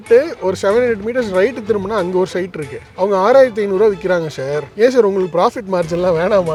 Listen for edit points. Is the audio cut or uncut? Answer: uncut